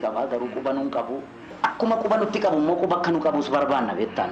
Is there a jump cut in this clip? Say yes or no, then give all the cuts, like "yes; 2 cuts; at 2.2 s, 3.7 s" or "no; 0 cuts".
yes; 1 cut; at 1.4 s